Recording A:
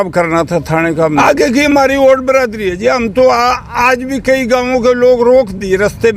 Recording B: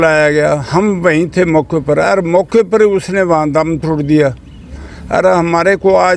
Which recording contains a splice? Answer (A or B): A